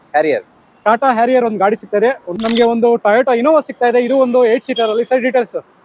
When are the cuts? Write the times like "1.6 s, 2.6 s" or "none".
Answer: 2.3 s